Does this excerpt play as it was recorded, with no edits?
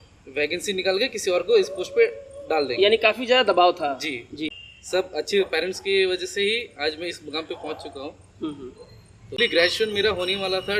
no; 2 cuts; at 4.5 s, 9.4 s

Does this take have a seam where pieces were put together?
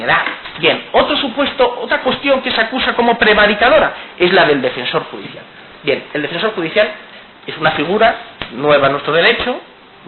yes; 1 cut; at 5.2 s

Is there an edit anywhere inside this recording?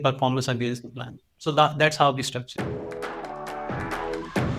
yes; 1 cut; at 2.4 s

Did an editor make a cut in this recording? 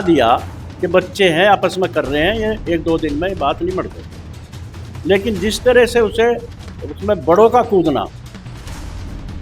no; 0 cuts

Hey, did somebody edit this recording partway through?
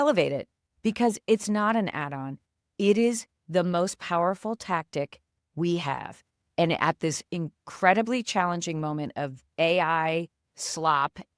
no; 0 cuts

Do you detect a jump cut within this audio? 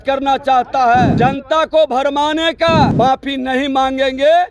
yes; 2 cuts; at 1.1 s, 2.9 s

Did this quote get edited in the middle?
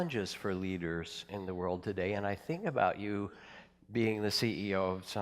yes; 1 cut; at 1.9 s

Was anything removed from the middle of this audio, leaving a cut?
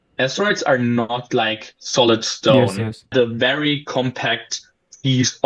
yes; 1 cut; at 3.1 s

